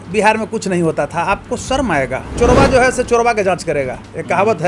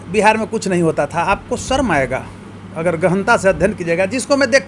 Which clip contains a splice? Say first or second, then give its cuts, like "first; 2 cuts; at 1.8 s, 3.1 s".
first; 1 cut; at 2.3 s